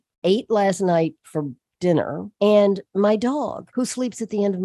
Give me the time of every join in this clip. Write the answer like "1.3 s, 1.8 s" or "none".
2.3 s, 3.6 s